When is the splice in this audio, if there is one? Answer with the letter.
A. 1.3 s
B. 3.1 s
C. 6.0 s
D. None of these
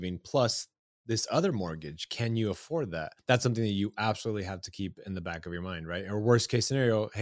B